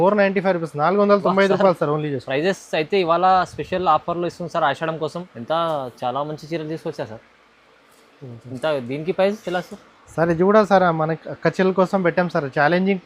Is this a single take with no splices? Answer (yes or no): no